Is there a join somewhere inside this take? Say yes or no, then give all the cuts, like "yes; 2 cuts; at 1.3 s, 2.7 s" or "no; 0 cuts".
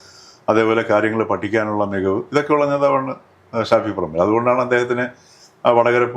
no; 0 cuts